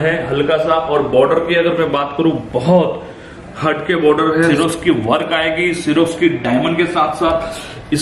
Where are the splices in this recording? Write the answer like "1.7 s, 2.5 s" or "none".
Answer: 4.5 s